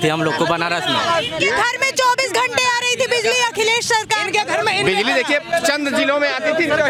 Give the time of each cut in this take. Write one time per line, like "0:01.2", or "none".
none